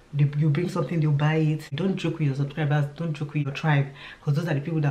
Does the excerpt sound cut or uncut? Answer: cut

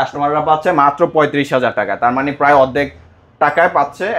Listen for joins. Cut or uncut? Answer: uncut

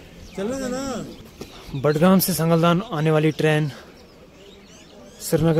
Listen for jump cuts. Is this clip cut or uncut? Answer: cut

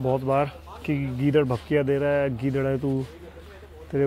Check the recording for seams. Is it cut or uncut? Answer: uncut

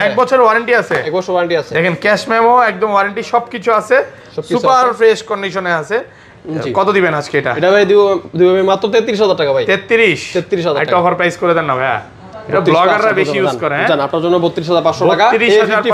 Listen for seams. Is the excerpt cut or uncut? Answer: uncut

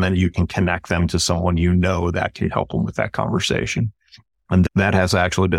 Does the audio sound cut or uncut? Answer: uncut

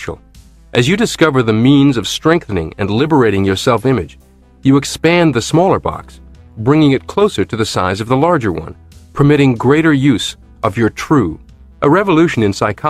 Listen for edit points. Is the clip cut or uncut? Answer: cut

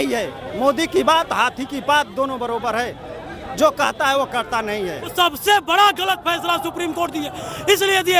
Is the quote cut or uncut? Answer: cut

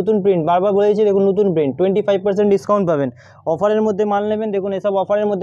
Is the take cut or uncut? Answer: uncut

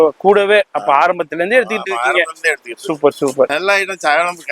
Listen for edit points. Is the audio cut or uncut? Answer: cut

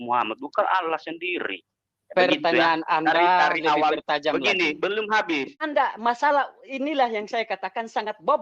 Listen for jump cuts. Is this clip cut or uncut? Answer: cut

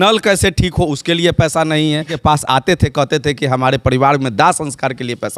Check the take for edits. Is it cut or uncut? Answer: cut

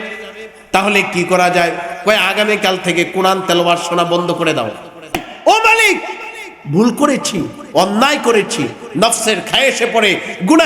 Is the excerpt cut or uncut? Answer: cut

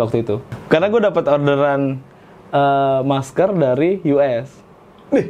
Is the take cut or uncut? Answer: uncut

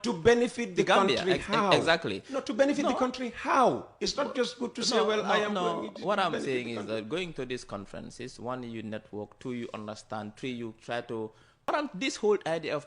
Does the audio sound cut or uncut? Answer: cut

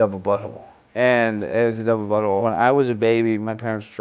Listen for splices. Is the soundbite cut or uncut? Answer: cut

